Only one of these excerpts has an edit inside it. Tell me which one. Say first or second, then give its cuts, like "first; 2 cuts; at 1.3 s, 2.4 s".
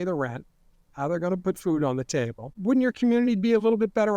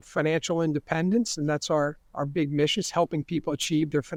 first; 1 cut; at 2.4 s